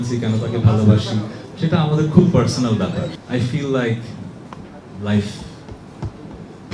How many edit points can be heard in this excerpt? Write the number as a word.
one